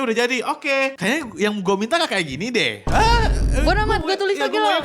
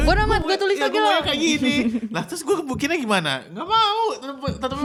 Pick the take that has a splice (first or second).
first